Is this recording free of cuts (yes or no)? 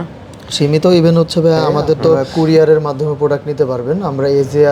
no